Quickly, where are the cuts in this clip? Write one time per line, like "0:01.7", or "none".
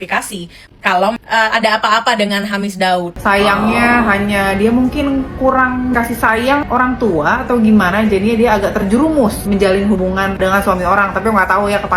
0:01.2
0:03.1
0:10.4